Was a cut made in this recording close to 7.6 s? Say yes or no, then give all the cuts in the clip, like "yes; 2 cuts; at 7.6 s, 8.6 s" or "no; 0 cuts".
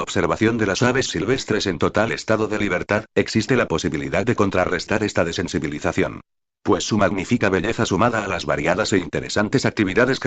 yes; 1 cut; at 7.6 s